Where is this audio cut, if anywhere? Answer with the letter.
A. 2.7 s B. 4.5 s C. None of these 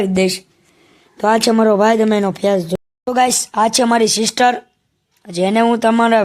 A